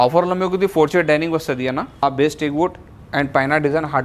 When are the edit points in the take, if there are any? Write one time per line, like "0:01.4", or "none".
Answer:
0:02.0